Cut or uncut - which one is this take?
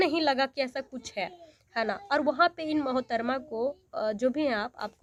uncut